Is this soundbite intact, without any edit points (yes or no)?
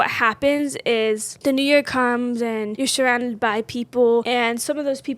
no